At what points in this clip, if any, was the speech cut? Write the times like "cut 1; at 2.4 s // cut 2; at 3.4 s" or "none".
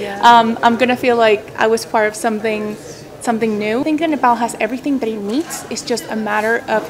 cut 1; at 3.8 s